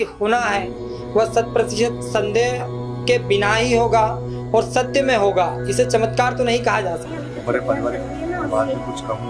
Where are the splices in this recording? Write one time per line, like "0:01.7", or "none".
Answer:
0:07.1

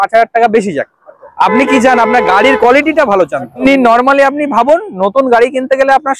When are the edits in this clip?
0:03.6

